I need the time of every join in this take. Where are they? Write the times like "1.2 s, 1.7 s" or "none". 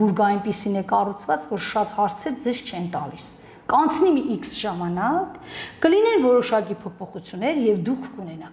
none